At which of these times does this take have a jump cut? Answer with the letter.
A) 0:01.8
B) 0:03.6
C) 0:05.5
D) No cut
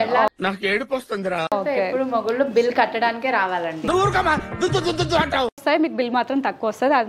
C